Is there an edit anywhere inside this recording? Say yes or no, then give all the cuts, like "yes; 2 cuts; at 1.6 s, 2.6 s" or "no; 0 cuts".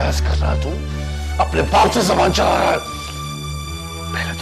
no; 0 cuts